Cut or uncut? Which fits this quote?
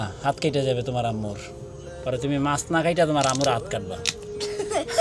uncut